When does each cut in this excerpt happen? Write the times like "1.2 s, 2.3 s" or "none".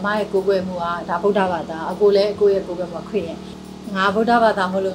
3.5 s